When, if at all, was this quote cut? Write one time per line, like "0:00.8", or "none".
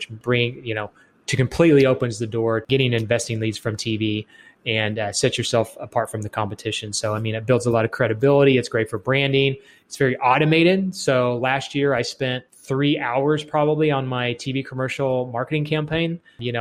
0:12.5